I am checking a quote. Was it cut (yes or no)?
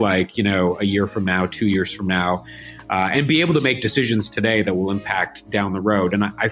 no